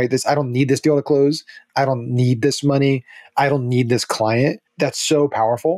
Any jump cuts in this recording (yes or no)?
yes